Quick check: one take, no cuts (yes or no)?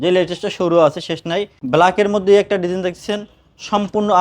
no